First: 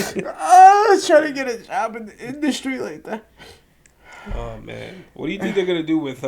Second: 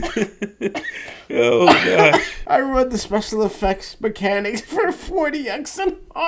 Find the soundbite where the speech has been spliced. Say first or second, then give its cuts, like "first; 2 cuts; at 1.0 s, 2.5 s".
second; 1 cut; at 2.3 s